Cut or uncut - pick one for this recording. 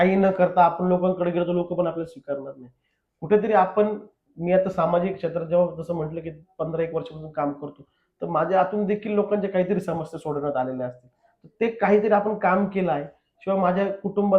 uncut